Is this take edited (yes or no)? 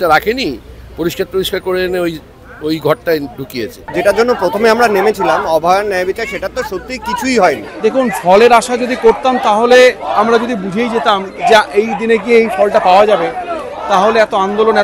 yes